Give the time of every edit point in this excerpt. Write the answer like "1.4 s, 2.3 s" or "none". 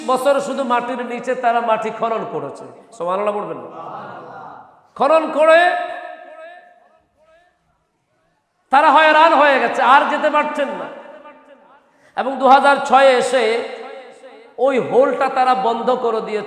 none